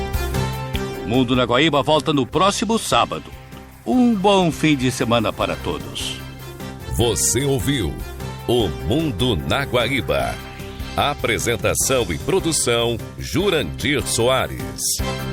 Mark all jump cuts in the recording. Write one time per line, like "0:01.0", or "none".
none